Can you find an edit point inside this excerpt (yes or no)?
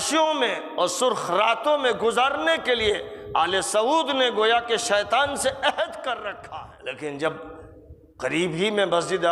yes